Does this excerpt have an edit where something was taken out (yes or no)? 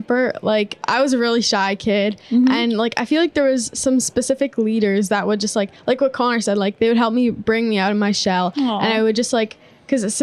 no